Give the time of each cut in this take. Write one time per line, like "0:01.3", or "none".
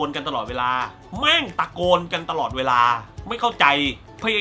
0:01.0
0:03.1